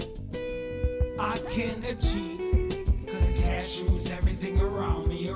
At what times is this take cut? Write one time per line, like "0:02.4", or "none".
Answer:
none